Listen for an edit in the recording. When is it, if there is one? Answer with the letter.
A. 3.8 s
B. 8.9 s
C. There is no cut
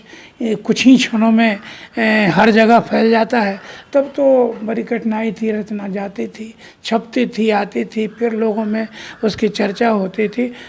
C